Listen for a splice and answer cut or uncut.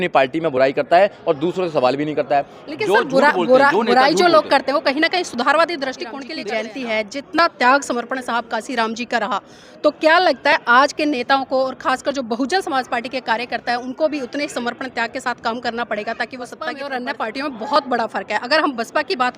cut